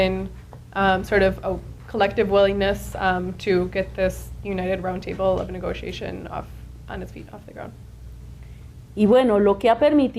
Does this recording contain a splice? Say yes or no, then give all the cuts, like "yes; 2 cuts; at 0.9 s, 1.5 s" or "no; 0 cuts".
yes; 1 cut; at 3.2 s